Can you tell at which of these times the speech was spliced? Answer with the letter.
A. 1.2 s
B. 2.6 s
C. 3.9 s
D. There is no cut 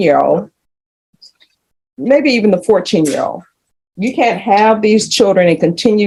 D